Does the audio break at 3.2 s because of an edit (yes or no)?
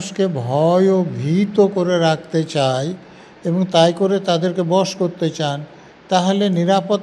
no